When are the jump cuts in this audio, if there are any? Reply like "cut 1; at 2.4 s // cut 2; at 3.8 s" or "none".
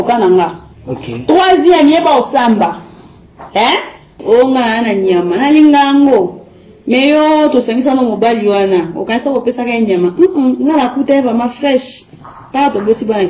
cut 1; at 4.2 s